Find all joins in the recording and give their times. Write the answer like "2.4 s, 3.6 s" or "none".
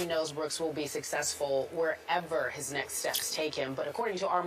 none